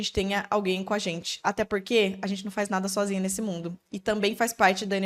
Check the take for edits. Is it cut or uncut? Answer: uncut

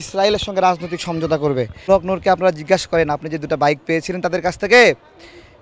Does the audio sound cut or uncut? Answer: cut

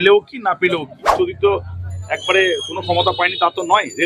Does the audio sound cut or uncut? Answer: cut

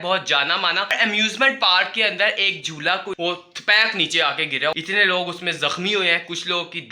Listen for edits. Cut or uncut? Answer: cut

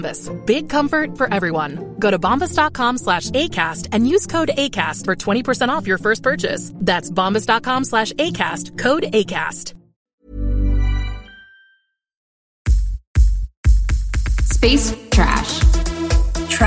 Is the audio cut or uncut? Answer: cut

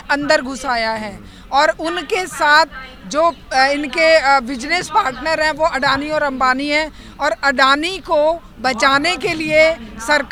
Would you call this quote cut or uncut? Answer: uncut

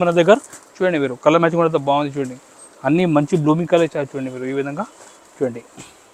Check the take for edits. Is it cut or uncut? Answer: uncut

